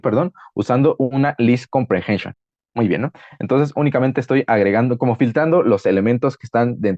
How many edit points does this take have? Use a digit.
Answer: 1